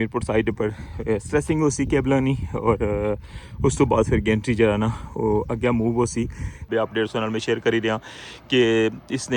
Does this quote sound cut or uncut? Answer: cut